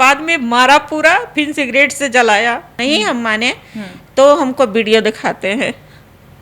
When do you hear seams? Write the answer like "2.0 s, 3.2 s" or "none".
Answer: 2.8 s